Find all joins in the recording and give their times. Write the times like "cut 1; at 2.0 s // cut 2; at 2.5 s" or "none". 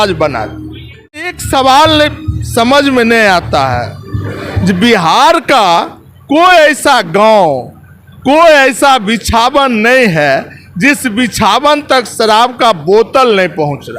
cut 1; at 1.4 s

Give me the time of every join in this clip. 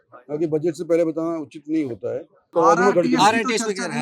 cut 1; at 2.5 s

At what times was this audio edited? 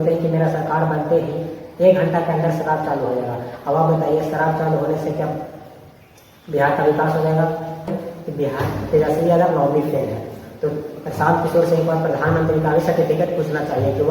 cut 1; at 8.0 s

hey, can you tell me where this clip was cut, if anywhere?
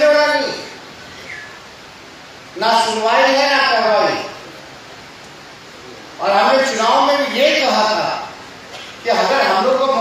none

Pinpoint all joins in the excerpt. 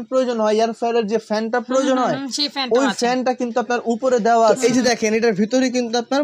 cut 1; at 4.6 s

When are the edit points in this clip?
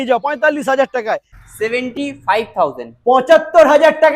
cut 1; at 1.3 s

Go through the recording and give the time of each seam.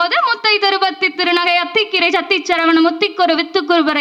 none

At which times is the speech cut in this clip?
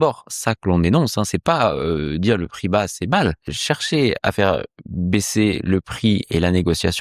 cut 1; at 3.5 s

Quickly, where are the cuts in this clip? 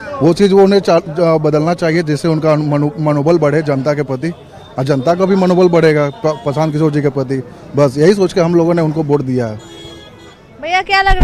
none

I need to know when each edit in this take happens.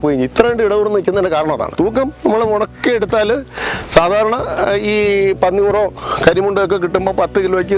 cut 1; at 1.7 s

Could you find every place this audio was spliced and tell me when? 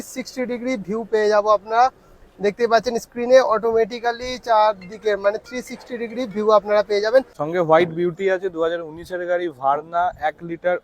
cut 1; at 7.4 s

